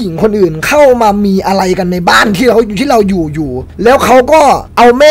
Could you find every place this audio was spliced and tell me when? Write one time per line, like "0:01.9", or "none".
none

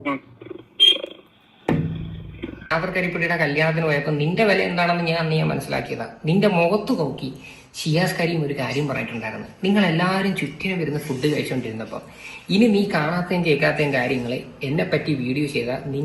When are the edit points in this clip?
0:02.6

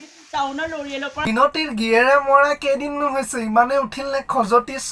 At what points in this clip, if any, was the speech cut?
0:01.3

